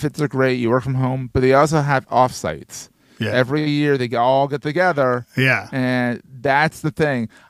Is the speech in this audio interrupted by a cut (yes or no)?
no